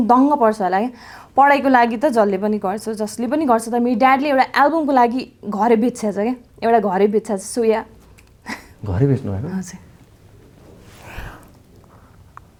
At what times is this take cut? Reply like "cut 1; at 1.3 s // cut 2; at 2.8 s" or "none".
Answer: none

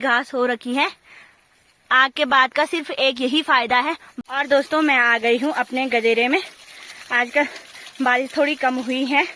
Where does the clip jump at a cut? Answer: cut 1; at 4.1 s

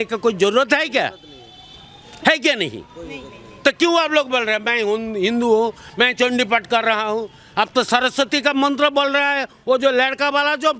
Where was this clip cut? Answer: none

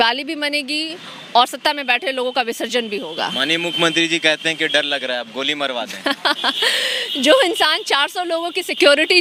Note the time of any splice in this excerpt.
none

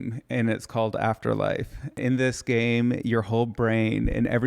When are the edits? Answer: cut 1; at 2.0 s

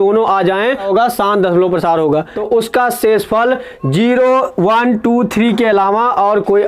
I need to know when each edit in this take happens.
cut 1; at 0.9 s // cut 2; at 2.3 s

